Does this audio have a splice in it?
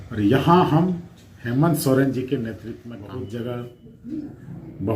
yes; 1 cut; at 2.7 s

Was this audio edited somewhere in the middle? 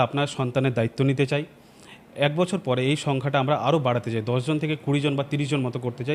no; 0 cuts

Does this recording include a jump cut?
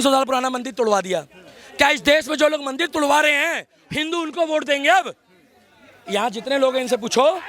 no; 0 cuts

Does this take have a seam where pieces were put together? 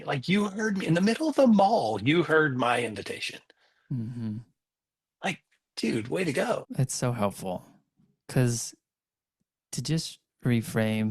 yes; 1 cut; at 6.6 s

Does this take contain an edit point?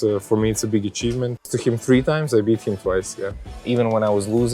yes; 2 cuts; at 1.5 s, 3.5 s

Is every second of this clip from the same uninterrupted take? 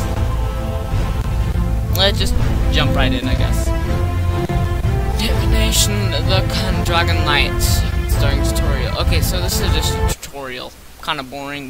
no; 1 cut; at 10.4 s

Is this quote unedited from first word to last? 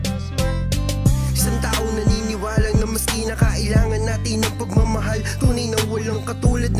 yes; 0 cuts

